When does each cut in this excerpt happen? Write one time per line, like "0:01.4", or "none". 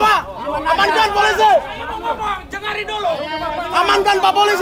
none